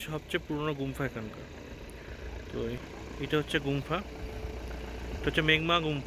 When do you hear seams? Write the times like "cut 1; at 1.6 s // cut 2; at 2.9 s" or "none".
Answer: none